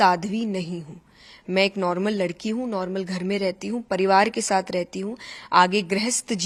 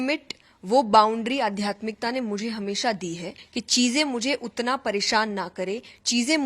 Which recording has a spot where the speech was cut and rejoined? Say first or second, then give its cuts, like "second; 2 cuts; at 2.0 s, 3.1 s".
second; 1 cut; at 3.4 s